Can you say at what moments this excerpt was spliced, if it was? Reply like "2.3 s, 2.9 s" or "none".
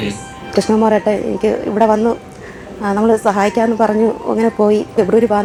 none